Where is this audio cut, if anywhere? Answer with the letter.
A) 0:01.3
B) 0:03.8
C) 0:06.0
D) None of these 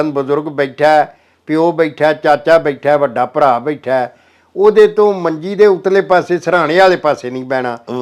D